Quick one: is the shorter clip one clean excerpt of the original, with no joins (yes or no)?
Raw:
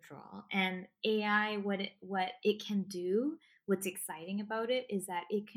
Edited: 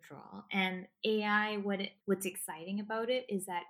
no